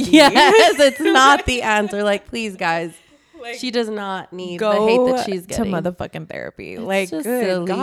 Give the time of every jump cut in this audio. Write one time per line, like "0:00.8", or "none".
none